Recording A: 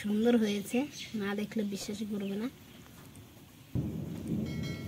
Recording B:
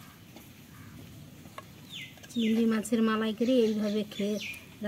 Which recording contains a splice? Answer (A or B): A